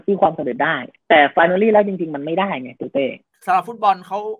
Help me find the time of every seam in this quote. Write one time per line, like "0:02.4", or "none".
0:03.2